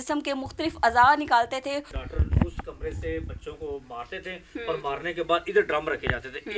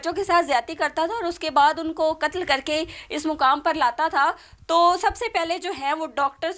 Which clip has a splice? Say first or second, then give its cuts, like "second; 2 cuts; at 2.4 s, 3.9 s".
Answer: first; 1 cut; at 1.9 s